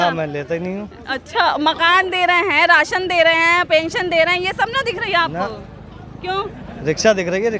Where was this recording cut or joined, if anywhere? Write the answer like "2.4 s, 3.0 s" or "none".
none

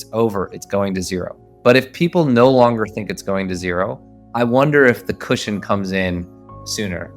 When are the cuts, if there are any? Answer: none

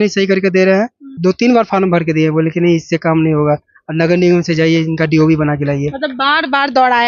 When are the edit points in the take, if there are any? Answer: 1.1 s

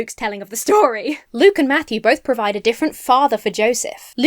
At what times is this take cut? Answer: 1.2 s

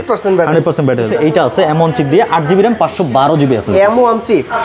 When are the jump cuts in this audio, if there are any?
1.1 s

